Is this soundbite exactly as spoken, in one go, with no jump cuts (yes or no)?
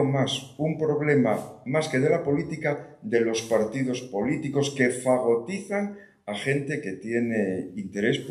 yes